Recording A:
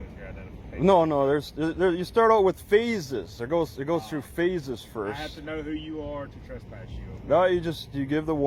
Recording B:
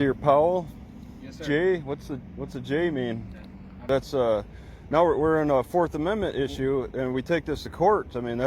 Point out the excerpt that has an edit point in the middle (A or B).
B